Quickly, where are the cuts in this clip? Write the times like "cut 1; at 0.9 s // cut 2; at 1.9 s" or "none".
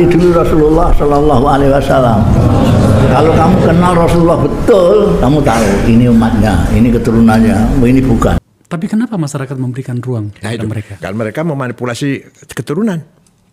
cut 1; at 8.4 s